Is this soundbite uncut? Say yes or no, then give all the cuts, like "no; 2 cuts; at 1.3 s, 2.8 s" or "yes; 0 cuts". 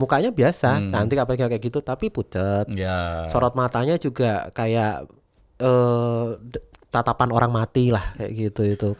yes; 0 cuts